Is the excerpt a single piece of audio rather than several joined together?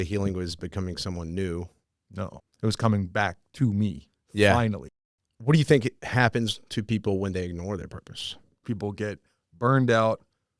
no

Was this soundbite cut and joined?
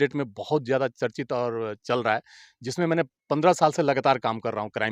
no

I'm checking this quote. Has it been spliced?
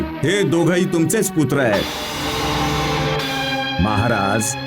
yes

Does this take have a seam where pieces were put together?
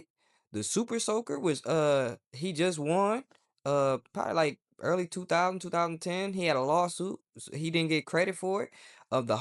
no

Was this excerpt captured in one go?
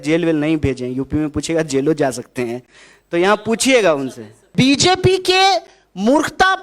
no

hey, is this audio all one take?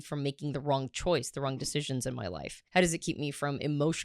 no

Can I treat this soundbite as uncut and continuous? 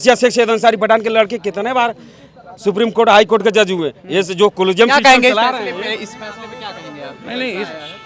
yes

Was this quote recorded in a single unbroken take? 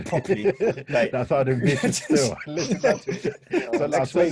yes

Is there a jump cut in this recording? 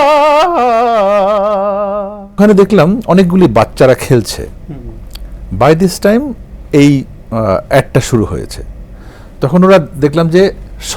yes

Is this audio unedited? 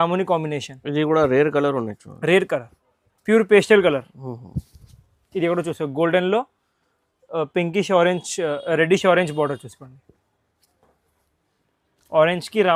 yes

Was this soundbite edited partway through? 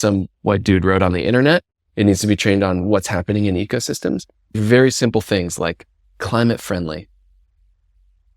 yes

